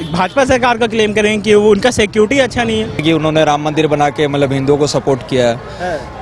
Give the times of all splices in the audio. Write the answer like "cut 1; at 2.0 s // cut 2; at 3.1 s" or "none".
cut 1; at 3.0 s